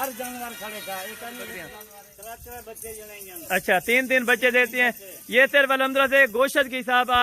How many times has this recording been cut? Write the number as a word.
one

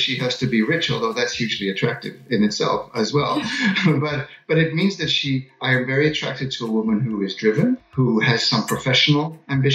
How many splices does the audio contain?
one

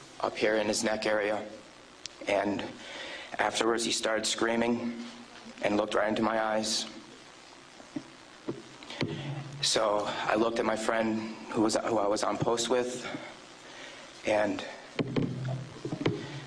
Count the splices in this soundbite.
zero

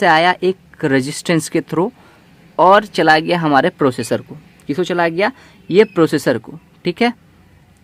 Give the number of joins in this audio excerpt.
zero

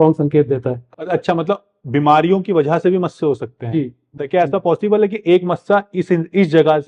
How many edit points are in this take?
two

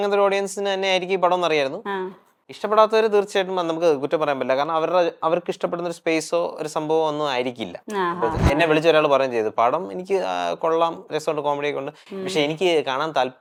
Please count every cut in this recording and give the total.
zero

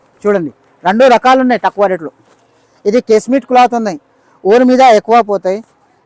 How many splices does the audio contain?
zero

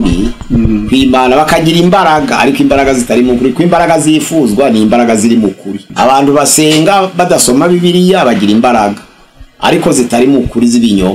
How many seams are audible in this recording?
one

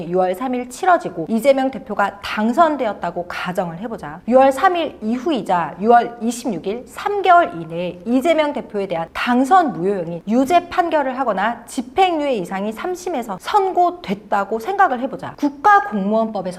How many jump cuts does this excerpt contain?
zero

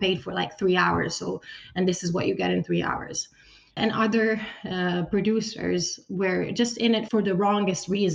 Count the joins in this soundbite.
two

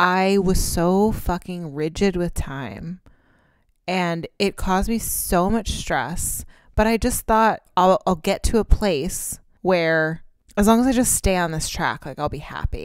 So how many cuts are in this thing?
zero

